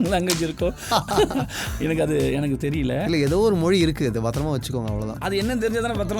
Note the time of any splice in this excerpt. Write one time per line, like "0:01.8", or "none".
0:05.1